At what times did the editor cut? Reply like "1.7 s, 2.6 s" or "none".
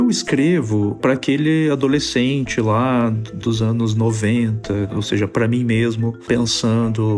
1.0 s